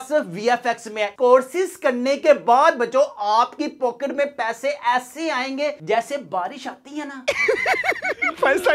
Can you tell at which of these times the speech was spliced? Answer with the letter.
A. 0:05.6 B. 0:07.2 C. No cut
B